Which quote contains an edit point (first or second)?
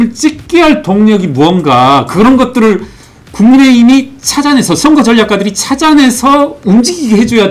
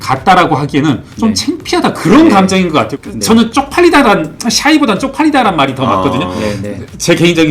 second